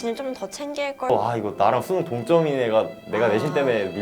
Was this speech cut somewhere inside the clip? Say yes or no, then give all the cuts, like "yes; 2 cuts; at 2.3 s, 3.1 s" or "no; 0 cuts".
yes; 1 cut; at 1.1 s